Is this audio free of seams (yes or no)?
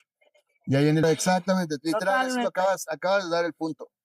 no